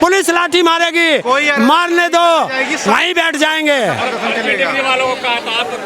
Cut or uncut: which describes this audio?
uncut